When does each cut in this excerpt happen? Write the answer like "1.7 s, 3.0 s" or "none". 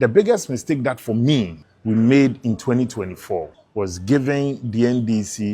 1.6 s, 3.6 s